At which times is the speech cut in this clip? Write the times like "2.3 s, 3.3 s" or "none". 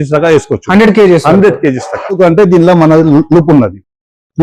2.2 s